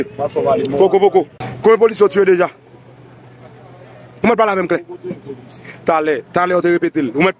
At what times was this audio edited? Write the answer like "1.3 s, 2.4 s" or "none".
1.4 s

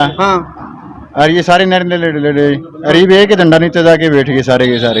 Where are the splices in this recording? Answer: none

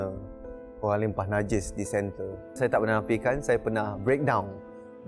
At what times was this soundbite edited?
2.6 s

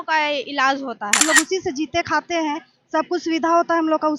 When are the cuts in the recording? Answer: 1.2 s

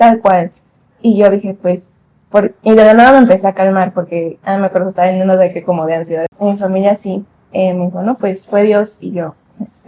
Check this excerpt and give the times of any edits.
6.3 s

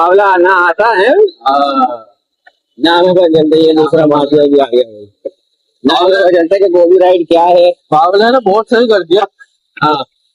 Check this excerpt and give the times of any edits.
none

